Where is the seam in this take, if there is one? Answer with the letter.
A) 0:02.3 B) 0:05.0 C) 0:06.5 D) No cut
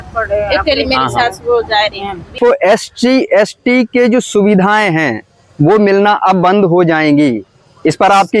A